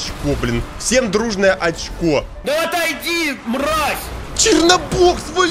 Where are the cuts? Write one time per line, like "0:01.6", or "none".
none